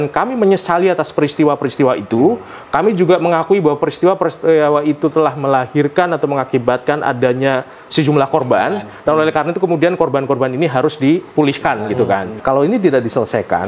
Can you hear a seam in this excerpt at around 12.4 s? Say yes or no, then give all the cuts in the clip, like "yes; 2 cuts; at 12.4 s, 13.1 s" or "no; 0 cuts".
yes; 1 cut; at 12.4 s